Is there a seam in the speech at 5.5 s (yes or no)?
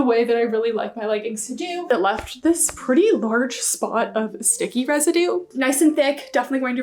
yes